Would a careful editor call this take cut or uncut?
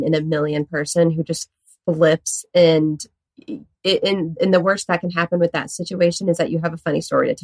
uncut